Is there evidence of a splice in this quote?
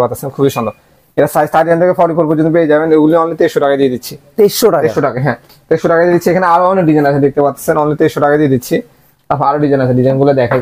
no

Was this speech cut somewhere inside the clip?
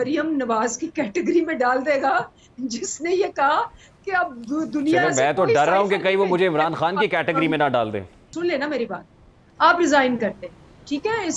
yes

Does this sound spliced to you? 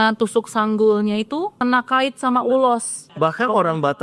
yes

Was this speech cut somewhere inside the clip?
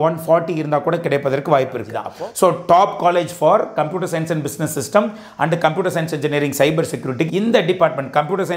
yes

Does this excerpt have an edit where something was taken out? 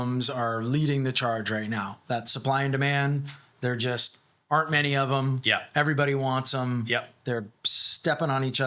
no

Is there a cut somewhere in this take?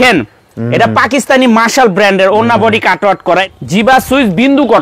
yes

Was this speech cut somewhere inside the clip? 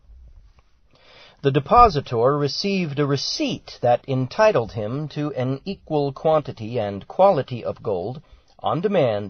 no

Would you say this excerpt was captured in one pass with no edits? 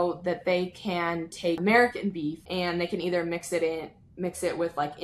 no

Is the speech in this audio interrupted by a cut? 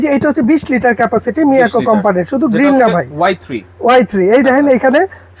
no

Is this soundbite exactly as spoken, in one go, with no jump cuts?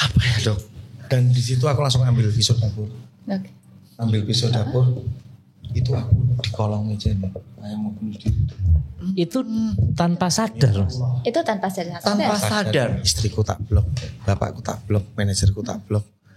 no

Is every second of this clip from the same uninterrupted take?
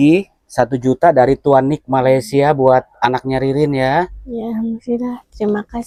yes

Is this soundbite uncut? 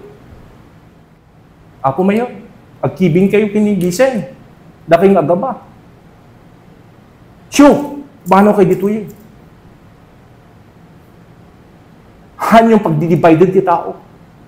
no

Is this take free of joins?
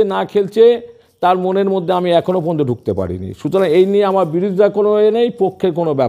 yes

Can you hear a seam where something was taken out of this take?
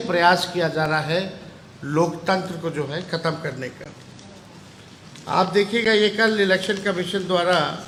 no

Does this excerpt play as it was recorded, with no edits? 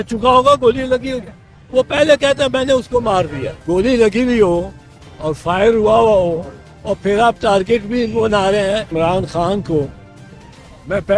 no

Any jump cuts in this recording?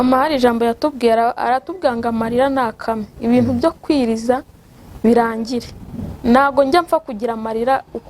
no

